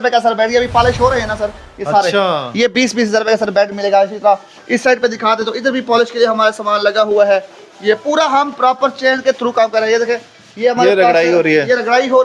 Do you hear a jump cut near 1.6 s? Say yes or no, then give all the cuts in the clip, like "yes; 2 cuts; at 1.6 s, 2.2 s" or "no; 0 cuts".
no; 0 cuts